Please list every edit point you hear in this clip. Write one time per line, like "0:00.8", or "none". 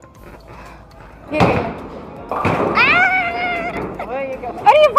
0:01.2